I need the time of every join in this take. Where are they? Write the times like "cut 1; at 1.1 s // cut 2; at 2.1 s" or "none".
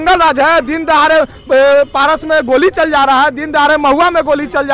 none